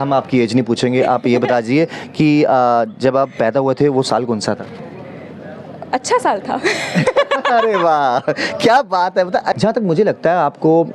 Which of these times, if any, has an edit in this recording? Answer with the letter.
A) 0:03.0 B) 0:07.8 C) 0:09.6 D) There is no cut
C